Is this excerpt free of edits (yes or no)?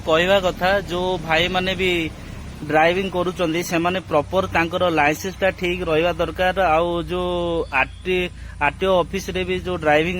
yes